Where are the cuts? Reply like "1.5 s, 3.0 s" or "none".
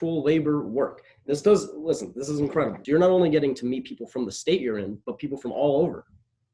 2.8 s